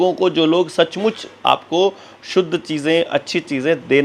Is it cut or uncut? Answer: uncut